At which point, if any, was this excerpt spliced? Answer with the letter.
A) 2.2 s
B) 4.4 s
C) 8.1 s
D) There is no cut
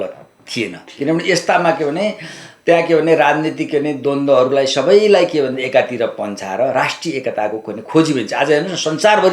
D